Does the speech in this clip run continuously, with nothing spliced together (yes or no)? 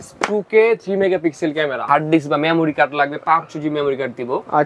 no